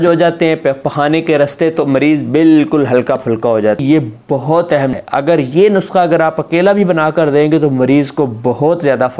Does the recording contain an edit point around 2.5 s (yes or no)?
no